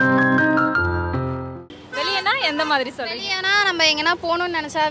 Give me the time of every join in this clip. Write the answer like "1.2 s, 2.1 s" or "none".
1.7 s